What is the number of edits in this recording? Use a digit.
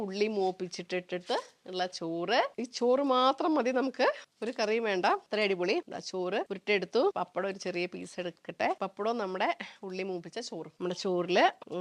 2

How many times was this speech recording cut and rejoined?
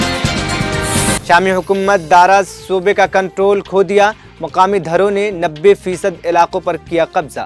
1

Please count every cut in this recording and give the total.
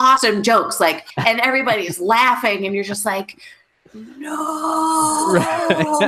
1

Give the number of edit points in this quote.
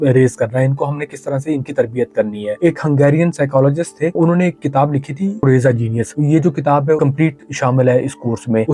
3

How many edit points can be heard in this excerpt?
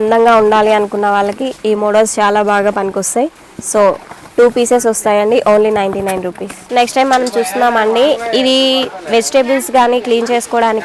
0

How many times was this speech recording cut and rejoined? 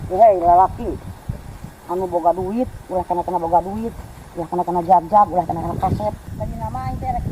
1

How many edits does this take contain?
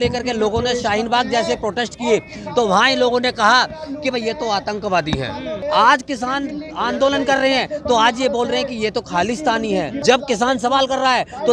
2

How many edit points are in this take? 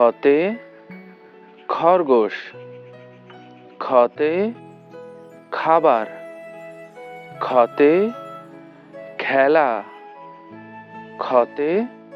2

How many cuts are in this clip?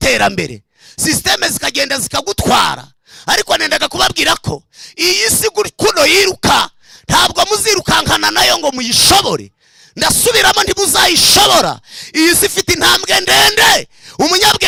0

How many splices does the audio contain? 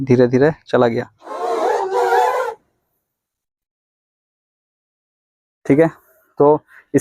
1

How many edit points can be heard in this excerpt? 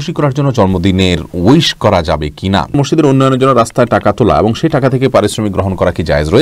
1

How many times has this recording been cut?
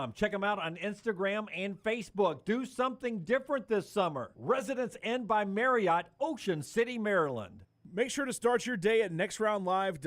1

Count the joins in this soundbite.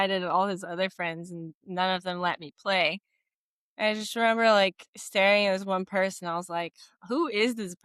0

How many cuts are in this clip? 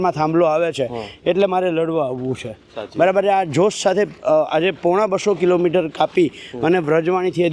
0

